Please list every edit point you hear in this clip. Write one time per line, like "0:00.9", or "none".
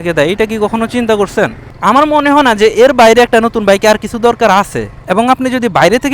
0:01.7
0:04.9